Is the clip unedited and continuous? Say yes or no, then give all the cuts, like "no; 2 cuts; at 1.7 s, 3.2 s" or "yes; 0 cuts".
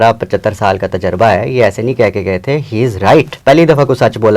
no; 1 cut; at 3.3 s